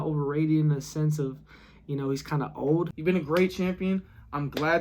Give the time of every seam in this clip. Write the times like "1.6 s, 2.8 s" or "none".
2.9 s